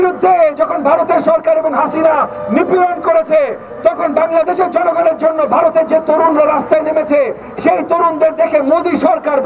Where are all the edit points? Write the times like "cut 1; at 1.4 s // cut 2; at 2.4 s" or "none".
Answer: none